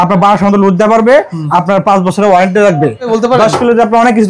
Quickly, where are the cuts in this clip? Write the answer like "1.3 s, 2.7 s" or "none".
3.1 s